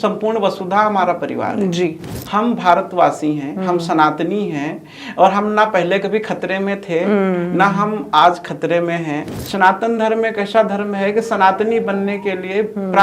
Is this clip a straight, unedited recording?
no; 2 cuts; at 2.1 s, 9.3 s

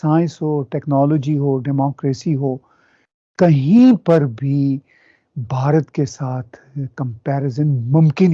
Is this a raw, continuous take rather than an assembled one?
yes; 0 cuts

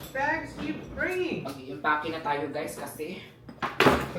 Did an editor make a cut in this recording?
no; 0 cuts

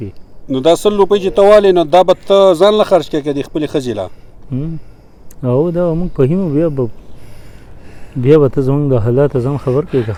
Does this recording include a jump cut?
no; 0 cuts

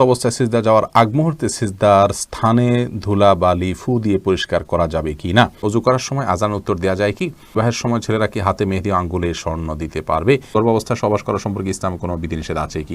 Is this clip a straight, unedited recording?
no; 3 cuts; at 5.6 s, 7.5 s, 10.5 s

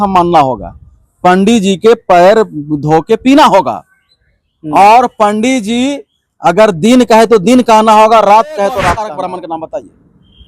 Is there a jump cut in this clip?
yes; 1 cut; at 9.1 s

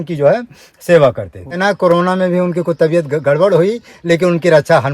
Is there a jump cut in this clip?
yes; 1 cut; at 1.6 s

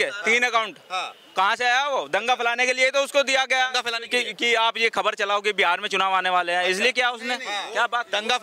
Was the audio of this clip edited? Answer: no; 0 cuts

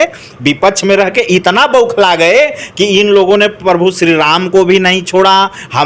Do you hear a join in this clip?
no; 0 cuts

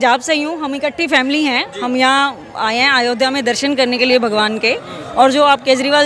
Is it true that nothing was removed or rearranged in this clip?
yes; 0 cuts

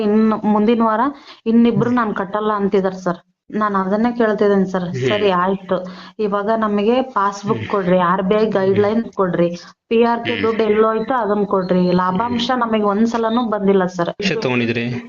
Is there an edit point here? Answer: yes; 2 cuts; at 3.3 s, 14.2 s

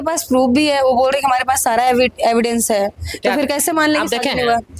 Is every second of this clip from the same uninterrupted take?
yes; 0 cuts

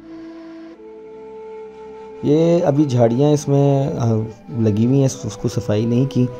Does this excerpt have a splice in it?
no; 0 cuts

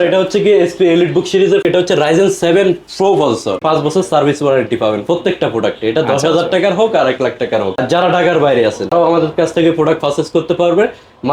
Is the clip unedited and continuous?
no; 4 cuts; at 1.6 s, 3.6 s, 7.7 s, 8.9 s

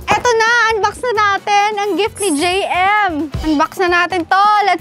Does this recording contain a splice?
no; 0 cuts

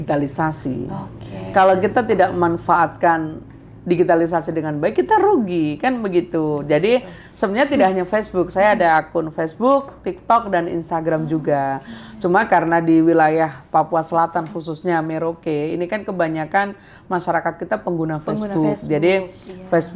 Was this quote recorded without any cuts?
yes; 0 cuts

